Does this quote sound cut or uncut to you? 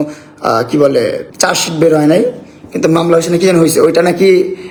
uncut